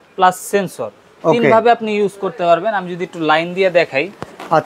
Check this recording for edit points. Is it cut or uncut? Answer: uncut